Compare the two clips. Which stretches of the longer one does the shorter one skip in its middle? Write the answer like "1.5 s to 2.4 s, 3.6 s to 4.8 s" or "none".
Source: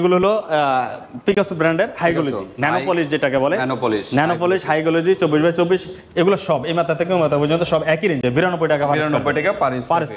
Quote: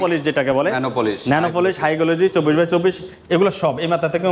none